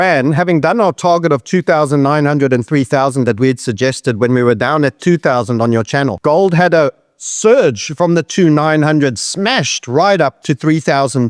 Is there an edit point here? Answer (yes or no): yes